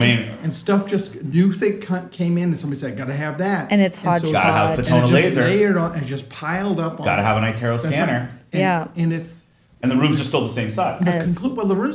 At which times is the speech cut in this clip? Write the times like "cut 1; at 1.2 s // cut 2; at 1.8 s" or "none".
none